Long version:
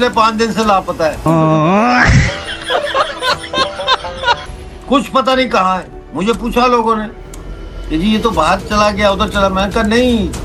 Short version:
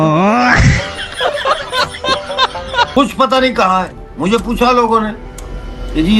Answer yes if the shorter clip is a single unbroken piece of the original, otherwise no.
no